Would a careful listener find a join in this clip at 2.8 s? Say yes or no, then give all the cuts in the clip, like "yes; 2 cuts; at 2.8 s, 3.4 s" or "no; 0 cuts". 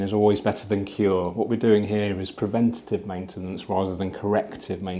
no; 0 cuts